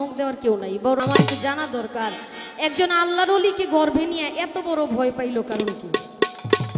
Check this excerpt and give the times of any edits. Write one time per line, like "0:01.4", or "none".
0:01.0